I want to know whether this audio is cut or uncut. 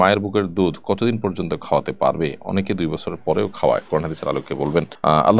uncut